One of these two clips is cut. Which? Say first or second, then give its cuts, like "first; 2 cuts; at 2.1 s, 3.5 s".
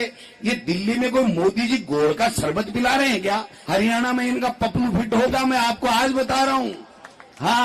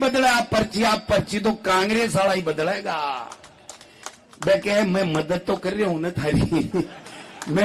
first; 1 cut; at 3.5 s